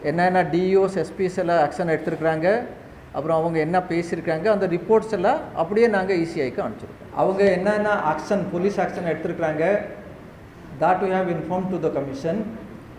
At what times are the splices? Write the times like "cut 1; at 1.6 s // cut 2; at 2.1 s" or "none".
cut 1; at 7.0 s